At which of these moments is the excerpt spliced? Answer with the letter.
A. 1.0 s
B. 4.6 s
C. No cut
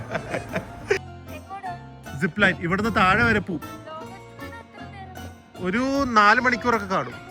A